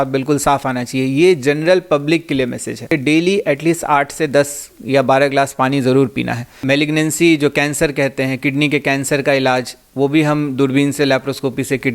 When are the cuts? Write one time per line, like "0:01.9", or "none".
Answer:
0:02.9
0:06.6

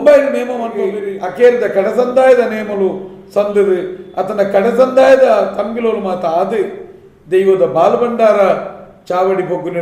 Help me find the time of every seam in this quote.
0:01.0

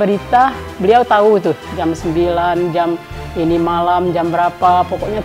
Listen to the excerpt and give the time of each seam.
none

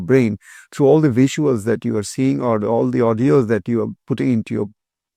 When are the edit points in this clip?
none

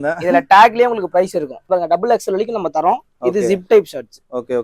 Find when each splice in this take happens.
0:01.6

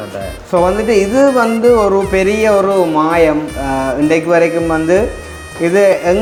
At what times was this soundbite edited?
none

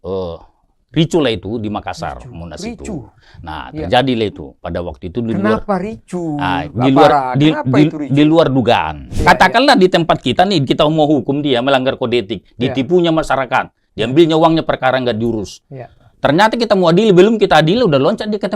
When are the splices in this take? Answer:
0:09.0

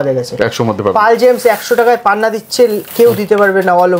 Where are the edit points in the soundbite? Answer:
none

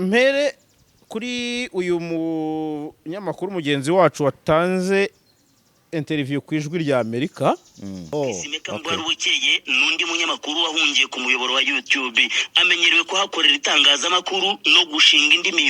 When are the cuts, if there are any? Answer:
0:08.1

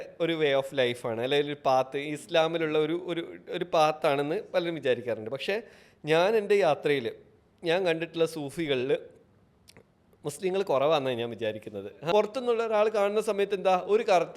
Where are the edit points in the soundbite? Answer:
0:12.0

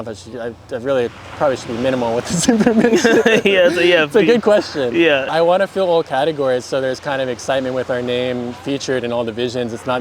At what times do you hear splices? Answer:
0:05.3

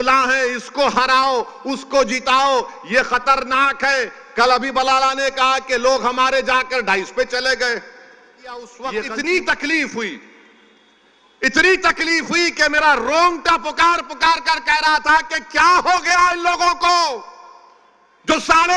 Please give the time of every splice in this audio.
0:08.8

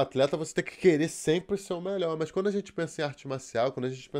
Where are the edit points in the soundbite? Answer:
none

